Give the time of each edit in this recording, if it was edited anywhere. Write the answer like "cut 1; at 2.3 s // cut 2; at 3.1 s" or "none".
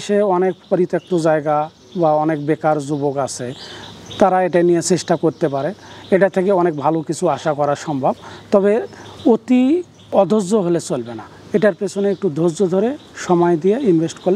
none